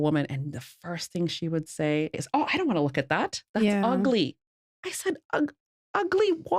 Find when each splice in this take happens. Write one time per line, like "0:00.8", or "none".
0:02.2